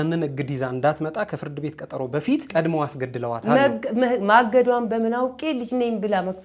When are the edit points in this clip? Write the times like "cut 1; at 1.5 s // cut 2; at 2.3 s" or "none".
cut 1; at 2.5 s